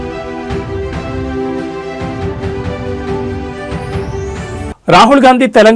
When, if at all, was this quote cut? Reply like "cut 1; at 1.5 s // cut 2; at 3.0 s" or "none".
cut 1; at 4.7 s